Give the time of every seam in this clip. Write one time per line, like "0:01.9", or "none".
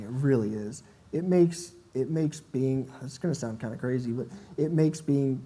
none